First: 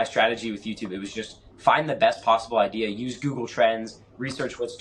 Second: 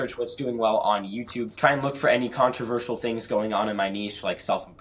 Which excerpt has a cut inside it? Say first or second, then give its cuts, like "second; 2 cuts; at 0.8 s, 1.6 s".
second; 1 cut; at 1.5 s